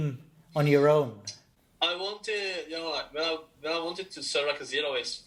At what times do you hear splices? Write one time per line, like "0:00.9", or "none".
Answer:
none